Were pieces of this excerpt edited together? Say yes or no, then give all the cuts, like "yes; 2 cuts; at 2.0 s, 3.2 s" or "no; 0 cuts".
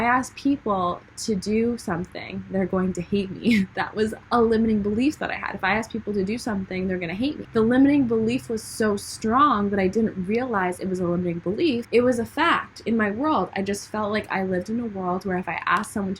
no; 0 cuts